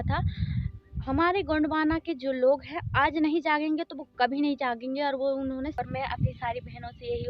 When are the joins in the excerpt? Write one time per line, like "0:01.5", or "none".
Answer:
0:05.7